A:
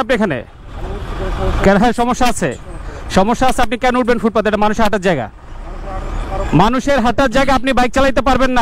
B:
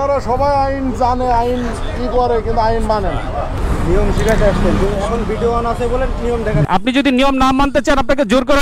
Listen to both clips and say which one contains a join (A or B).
B